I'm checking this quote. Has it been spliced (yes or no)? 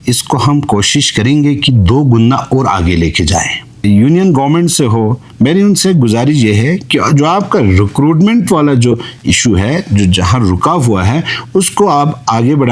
yes